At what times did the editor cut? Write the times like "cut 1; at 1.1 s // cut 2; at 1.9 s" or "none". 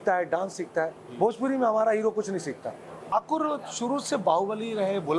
cut 1; at 2.9 s